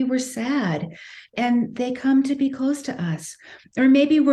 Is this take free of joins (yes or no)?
no